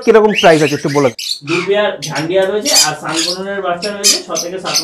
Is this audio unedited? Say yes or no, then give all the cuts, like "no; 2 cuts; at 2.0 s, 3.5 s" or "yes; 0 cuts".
no; 1 cut; at 1.3 s